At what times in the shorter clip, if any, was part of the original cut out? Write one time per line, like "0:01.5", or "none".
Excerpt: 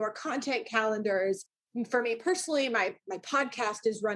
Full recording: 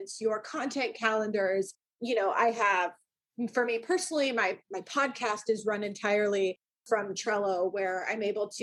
0:01.5